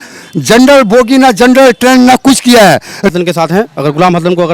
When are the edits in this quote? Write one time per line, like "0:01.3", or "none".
0:03.1